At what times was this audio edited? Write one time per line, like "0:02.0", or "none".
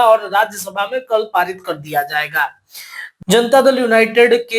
none